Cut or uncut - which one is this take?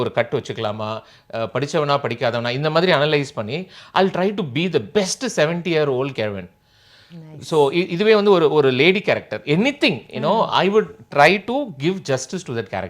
uncut